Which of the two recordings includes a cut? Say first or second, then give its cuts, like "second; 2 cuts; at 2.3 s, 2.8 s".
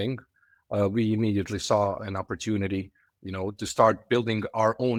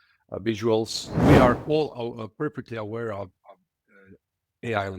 second; 1 cut; at 1.2 s